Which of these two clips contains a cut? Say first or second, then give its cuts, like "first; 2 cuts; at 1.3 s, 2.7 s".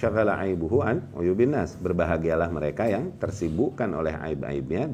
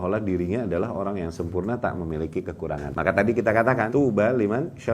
second; 2 cuts; at 2.9 s, 3.9 s